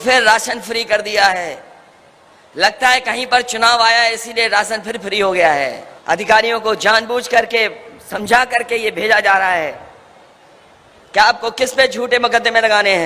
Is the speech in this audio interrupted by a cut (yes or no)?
yes